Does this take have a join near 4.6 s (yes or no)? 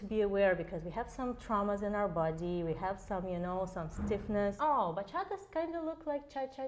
yes